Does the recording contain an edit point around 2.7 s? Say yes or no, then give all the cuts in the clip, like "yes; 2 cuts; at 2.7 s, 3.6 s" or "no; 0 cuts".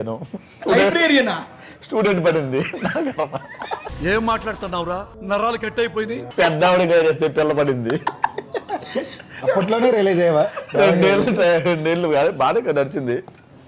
no; 0 cuts